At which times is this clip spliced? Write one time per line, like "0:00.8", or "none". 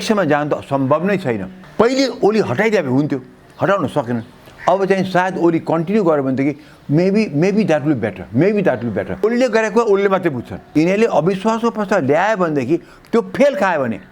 0:01.6
0:09.2
0:10.5